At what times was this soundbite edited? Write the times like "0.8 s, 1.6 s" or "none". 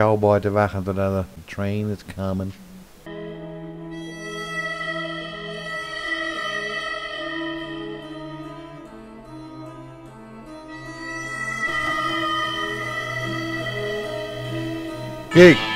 1.4 s